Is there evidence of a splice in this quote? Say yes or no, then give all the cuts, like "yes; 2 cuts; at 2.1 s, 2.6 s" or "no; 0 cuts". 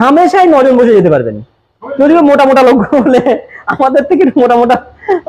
no; 0 cuts